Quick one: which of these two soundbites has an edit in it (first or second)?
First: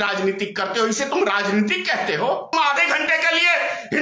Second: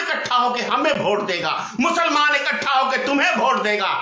first